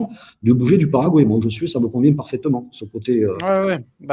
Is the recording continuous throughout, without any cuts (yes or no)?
yes